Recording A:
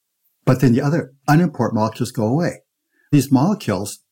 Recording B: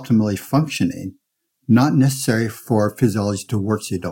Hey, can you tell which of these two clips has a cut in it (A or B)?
A